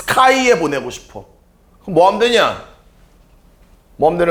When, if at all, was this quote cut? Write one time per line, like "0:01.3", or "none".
none